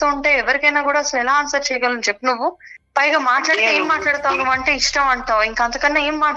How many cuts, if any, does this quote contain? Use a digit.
0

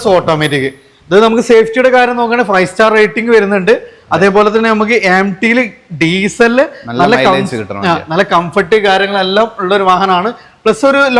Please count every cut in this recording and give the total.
0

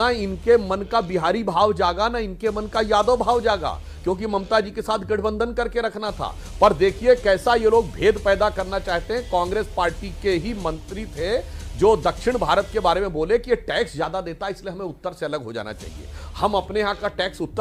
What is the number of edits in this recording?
0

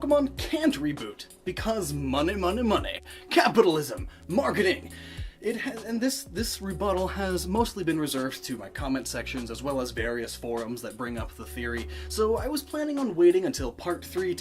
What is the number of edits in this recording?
1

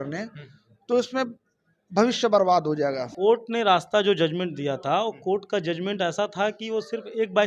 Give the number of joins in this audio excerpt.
1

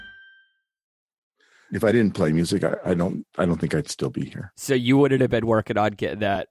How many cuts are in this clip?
1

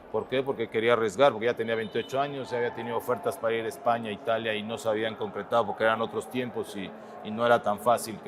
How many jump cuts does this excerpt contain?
0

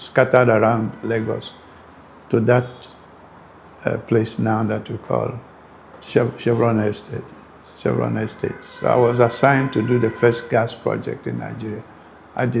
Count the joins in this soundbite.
1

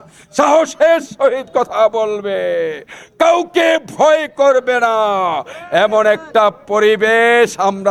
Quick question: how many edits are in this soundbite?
0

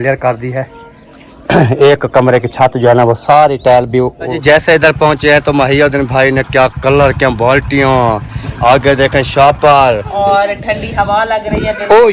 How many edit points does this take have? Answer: 2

